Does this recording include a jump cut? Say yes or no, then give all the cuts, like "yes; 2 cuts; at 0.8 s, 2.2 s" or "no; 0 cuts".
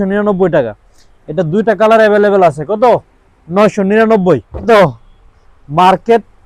yes; 1 cut; at 4.6 s